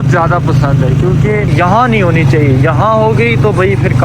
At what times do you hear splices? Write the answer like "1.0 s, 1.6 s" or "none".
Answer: 1.5 s

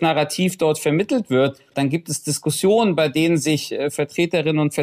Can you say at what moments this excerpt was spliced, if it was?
1.7 s

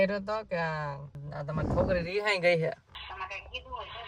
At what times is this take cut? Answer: 2.9 s

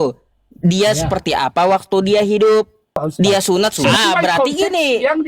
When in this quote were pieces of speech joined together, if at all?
3.9 s

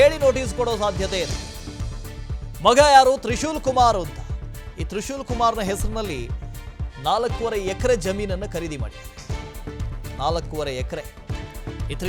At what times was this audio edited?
none

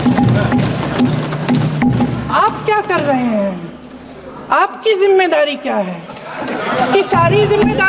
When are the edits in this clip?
none

